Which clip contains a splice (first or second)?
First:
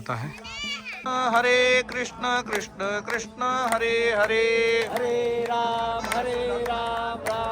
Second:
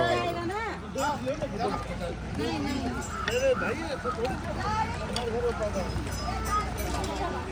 first